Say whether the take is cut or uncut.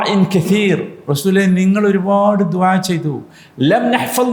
uncut